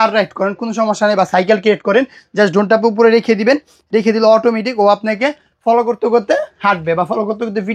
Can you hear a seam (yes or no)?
no